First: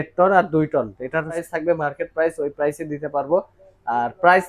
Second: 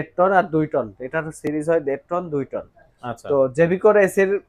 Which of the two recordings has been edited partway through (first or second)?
first